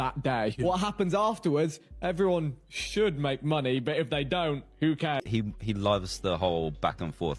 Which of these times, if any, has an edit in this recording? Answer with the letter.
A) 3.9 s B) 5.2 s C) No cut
B